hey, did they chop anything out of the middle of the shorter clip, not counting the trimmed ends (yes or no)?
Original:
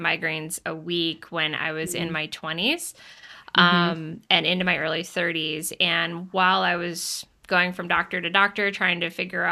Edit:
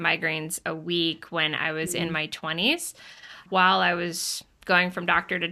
yes